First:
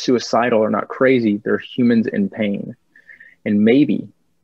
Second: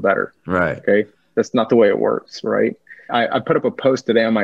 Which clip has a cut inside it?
second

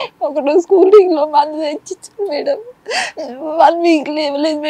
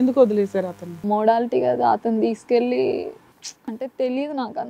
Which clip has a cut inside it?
second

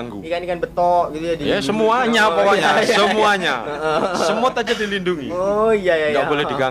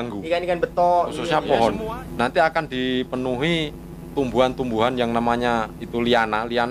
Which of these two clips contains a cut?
second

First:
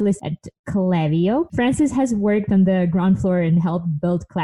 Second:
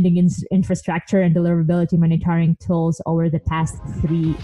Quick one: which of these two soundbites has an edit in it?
first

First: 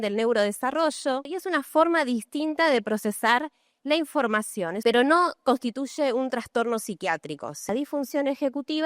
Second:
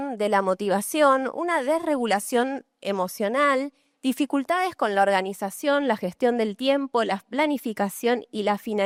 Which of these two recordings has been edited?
first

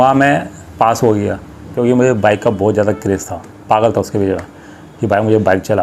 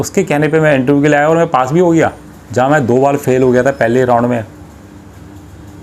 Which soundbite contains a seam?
first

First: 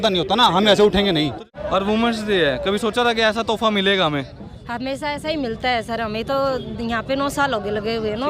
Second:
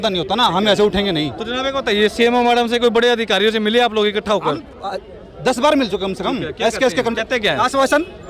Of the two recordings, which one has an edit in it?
first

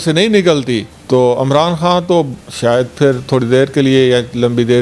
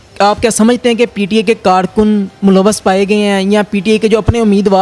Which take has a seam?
first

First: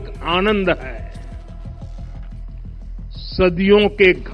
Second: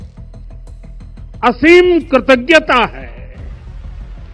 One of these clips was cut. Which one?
first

